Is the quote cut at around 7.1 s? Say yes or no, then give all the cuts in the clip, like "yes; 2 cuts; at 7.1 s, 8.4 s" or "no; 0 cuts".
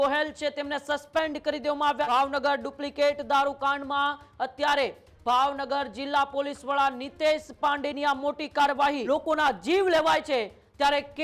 no; 2 cuts; at 2.1 s, 9.0 s